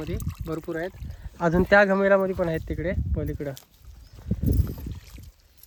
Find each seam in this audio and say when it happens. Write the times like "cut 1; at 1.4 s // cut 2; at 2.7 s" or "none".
none